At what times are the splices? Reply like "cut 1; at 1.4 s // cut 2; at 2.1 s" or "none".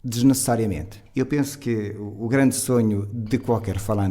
cut 1; at 0.9 s